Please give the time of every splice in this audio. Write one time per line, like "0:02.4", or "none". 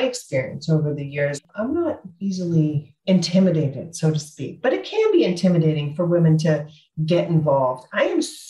0:01.4